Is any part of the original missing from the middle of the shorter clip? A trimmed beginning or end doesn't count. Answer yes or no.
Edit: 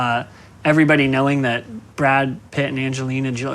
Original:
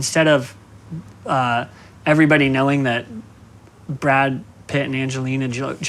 yes